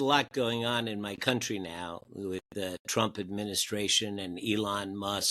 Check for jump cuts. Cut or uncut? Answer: uncut